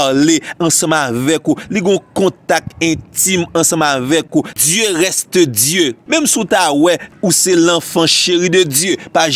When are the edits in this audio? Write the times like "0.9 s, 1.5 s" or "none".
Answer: 4.3 s, 6.0 s, 7.1 s